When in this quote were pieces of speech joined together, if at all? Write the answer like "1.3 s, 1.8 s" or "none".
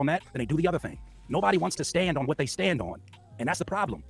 none